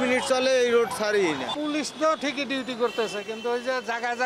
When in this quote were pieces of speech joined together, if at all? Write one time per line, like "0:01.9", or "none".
0:01.5